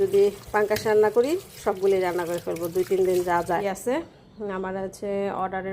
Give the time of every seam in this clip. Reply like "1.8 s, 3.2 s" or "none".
3.6 s